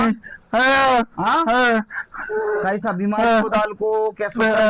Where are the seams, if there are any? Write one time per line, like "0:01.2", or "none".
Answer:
none